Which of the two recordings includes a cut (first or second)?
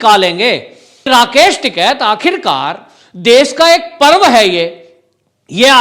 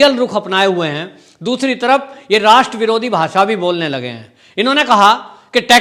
first